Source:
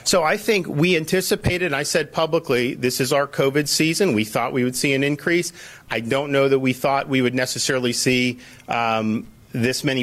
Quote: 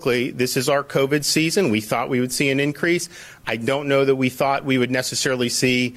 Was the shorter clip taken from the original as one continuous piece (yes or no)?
yes